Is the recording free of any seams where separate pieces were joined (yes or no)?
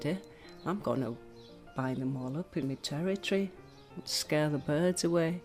yes